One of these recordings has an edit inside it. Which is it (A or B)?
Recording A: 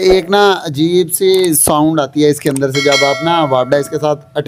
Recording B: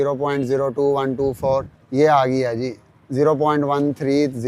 B